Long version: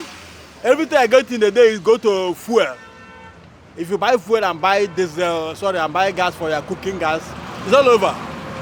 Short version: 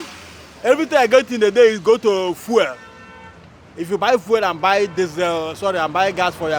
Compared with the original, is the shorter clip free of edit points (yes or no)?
yes